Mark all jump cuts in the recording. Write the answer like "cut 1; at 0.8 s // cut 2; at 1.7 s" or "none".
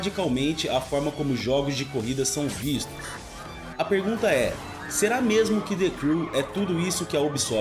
none